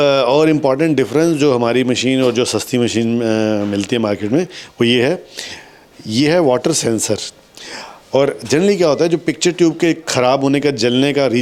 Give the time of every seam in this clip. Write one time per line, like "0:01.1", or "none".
none